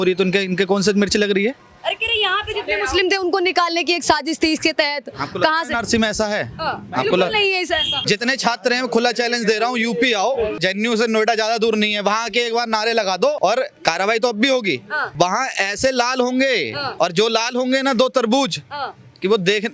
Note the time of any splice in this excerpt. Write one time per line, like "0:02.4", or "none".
0:07.9
0:10.5
0:13.4
0:15.0
0:16.8